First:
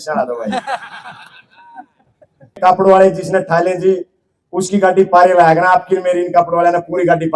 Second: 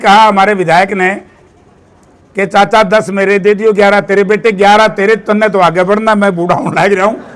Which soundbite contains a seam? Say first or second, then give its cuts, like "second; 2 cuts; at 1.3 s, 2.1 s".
first; 1 cut; at 2.6 s